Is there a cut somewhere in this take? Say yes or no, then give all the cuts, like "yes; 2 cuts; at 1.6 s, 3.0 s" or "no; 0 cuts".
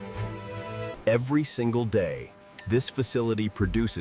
no; 0 cuts